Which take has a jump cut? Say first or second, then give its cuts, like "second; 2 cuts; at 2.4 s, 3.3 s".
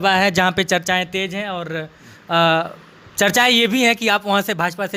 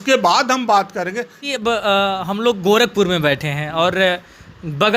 second; 1 cut; at 1.4 s